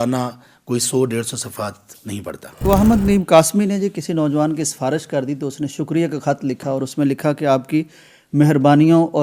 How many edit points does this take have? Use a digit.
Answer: 1